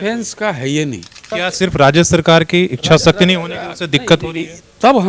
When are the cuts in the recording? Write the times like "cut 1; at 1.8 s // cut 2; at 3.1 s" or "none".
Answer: cut 1; at 1.3 s